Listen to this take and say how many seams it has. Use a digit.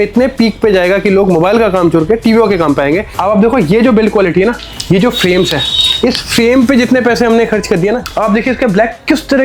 2